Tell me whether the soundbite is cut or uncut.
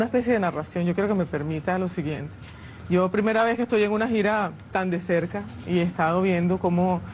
cut